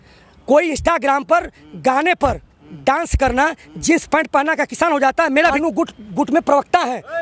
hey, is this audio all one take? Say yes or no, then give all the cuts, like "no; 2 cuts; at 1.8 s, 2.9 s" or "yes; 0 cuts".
no; 1 cut; at 5.6 s